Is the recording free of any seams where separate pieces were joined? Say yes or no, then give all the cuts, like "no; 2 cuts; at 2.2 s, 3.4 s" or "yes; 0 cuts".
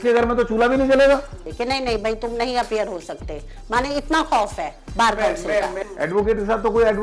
no; 2 cuts; at 1.4 s, 5.7 s